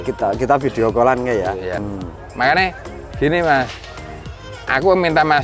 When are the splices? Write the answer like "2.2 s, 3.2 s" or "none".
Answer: 1.8 s